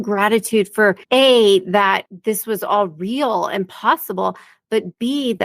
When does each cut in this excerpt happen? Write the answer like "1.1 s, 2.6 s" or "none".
1.0 s, 2.1 s